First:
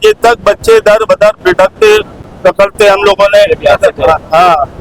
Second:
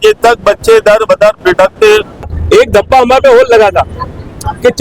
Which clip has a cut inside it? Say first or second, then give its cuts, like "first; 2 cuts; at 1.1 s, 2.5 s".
second; 1 cut; at 2.3 s